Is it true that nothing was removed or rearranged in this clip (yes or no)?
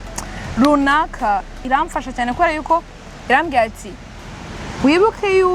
no